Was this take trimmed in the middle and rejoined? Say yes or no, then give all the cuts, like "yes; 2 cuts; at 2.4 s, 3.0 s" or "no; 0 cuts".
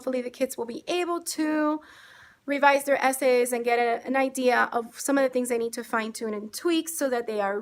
no; 0 cuts